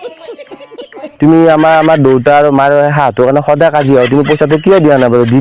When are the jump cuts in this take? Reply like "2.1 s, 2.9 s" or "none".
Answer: 1.0 s

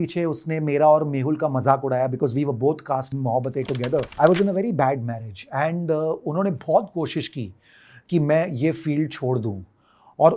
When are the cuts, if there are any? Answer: 3.2 s, 4.1 s

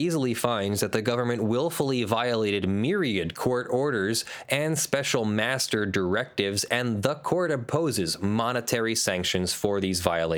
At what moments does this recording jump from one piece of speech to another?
none

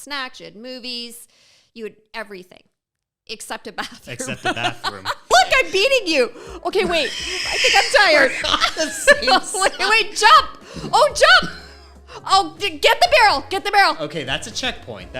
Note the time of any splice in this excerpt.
5.3 s

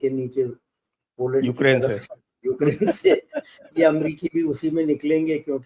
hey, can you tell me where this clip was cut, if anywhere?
none

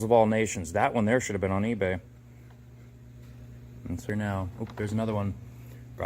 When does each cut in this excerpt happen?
4.1 s

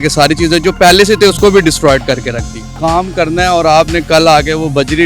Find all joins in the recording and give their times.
2.6 s

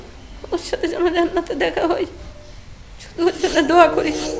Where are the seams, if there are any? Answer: none

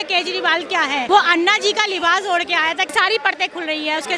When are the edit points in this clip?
1.0 s, 2.9 s

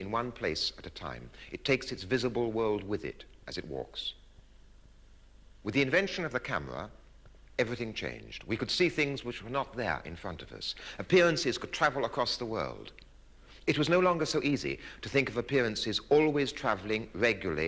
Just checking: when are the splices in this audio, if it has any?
3.9 s

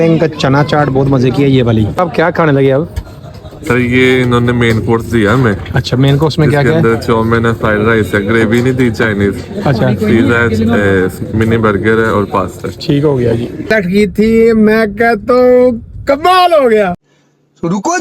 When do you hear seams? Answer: 2.0 s, 13.7 s

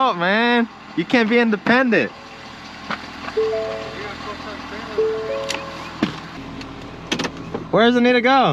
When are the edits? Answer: none

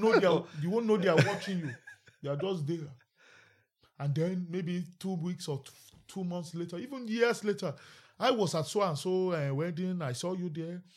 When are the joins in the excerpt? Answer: none

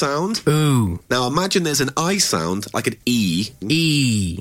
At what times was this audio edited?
1.0 s, 3.6 s

